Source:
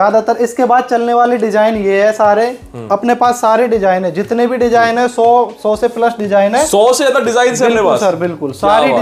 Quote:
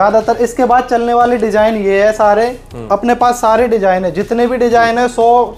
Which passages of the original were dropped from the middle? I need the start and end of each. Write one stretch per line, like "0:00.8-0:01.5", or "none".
none